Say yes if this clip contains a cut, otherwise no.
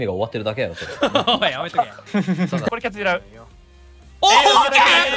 yes